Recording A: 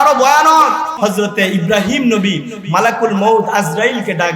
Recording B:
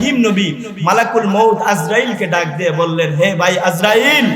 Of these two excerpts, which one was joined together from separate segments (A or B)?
A